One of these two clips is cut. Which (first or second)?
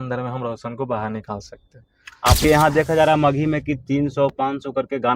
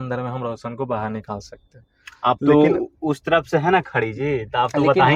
first